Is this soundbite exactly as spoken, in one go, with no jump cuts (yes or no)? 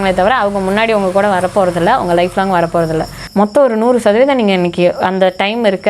no